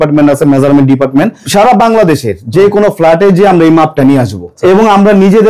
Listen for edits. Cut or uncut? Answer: cut